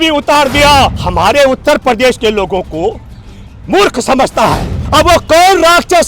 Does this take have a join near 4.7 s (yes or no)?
yes